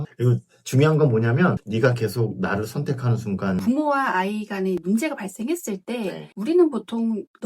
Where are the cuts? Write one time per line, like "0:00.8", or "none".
0:01.6
0:03.6
0:04.8